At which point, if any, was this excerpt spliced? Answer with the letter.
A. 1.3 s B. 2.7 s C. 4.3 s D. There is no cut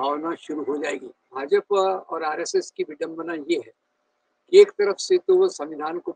A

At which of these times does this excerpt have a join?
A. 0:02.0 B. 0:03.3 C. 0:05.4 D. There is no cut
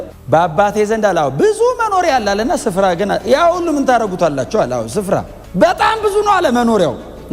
C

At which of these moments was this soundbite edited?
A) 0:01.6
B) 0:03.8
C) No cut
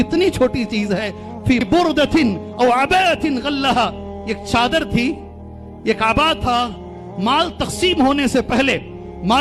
A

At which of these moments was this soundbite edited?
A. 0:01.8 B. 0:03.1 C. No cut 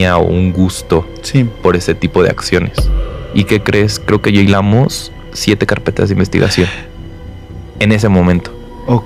B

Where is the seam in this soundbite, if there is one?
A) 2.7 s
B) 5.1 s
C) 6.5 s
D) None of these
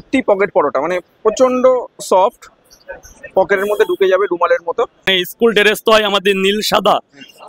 B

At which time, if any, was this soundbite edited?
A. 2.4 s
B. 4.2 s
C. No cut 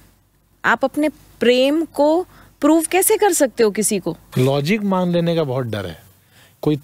B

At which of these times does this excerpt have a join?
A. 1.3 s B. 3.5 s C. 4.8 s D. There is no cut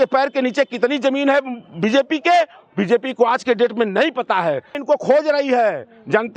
C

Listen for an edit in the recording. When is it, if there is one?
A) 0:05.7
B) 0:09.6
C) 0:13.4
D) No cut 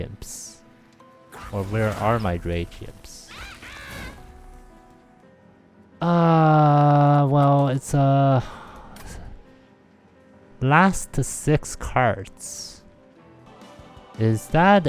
C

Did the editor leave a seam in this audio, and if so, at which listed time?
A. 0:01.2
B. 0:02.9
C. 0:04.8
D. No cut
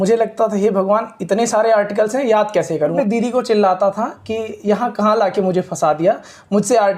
B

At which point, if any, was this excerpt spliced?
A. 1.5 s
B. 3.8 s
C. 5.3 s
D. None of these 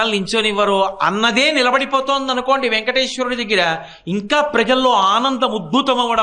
D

